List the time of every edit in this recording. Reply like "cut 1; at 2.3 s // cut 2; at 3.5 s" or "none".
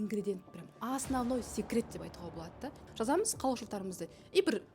cut 1; at 2.8 s